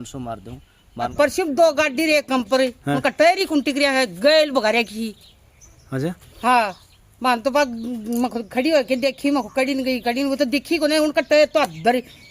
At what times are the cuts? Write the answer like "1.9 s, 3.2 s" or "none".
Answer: 1.1 s